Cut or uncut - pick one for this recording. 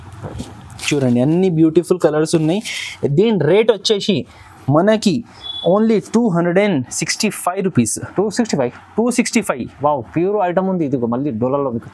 uncut